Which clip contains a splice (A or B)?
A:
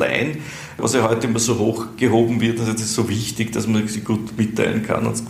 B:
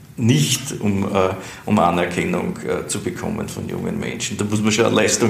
A